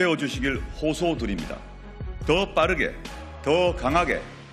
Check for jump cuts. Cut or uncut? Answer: uncut